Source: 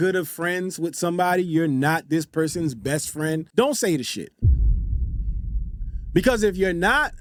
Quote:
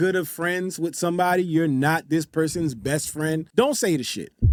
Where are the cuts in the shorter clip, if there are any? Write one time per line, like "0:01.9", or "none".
none